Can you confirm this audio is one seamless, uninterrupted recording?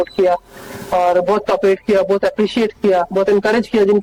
yes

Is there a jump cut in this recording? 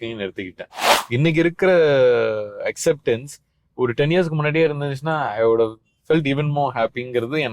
yes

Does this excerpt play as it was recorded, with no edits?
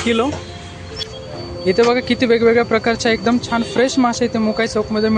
yes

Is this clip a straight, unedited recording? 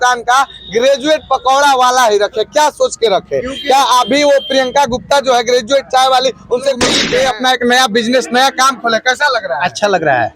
no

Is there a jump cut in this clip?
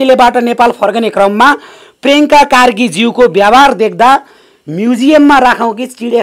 no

